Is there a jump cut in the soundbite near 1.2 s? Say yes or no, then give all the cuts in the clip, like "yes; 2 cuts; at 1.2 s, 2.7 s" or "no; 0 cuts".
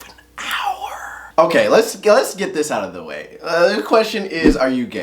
yes; 1 cut; at 1.2 s